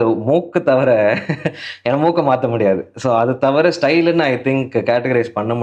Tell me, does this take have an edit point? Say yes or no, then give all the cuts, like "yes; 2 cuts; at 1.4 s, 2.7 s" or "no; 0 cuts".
no; 0 cuts